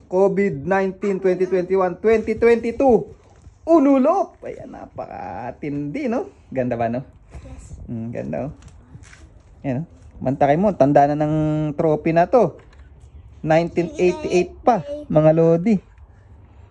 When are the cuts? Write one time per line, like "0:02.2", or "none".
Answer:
none